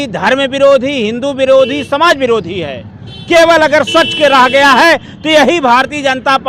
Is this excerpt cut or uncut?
uncut